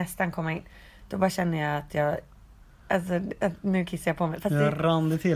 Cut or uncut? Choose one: uncut